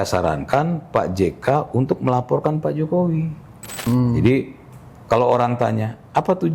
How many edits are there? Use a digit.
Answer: 1